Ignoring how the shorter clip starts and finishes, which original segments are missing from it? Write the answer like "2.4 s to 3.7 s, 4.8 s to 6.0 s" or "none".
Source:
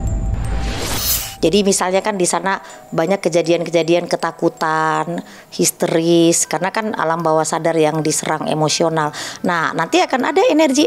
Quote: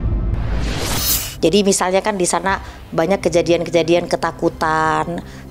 none